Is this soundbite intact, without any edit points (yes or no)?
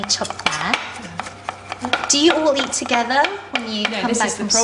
yes